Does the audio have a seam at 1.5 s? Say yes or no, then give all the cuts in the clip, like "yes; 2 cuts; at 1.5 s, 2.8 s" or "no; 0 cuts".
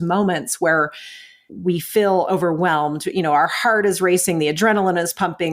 yes; 1 cut; at 1.5 s